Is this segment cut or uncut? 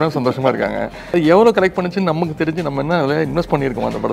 cut